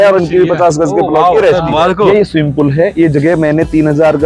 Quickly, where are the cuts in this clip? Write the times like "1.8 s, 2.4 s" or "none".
2.1 s